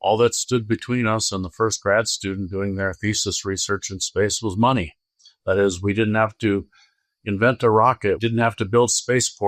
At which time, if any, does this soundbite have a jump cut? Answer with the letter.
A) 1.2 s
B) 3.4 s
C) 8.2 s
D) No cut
C